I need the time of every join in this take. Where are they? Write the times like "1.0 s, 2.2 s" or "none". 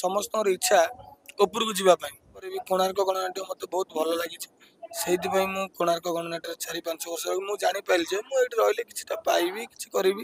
2.6 s